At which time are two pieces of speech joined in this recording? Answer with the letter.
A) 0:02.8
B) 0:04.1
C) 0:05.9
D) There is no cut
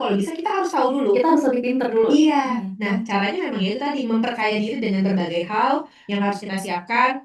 D